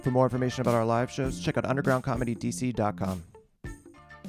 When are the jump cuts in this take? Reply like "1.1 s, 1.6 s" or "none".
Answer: 3.3 s

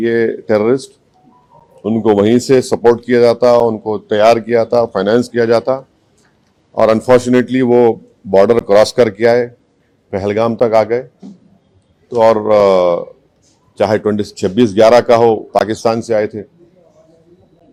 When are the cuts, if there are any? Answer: none

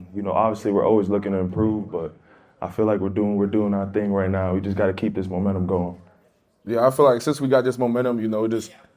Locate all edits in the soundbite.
none

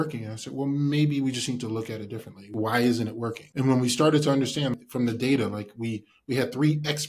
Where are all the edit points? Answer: 2.5 s, 3.4 s, 4.8 s

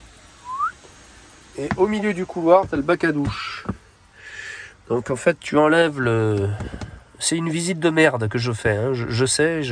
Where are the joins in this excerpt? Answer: none

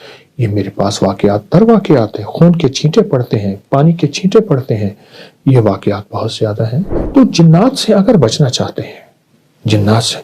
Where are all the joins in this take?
7.0 s

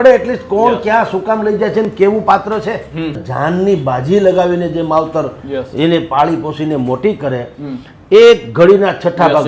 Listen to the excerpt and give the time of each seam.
3.2 s

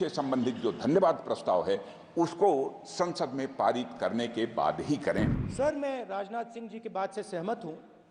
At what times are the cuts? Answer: 5.4 s

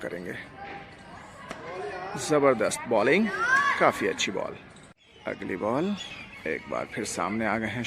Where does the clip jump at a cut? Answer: 5.1 s

